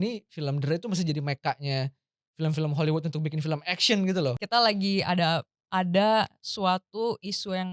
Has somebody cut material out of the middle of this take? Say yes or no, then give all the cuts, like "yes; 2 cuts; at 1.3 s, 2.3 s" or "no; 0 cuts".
yes; 1 cut; at 4.4 s